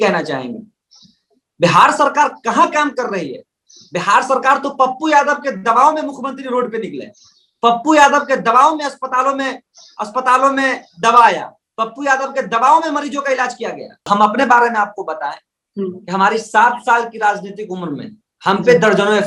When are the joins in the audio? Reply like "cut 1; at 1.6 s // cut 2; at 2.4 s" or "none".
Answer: cut 1; at 14.0 s